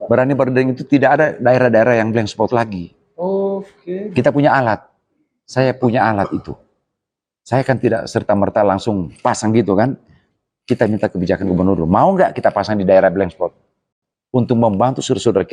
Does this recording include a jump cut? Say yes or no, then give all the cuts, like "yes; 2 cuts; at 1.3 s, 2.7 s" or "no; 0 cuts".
no; 0 cuts